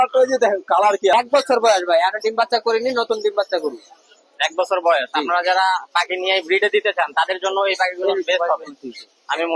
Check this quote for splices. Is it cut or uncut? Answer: cut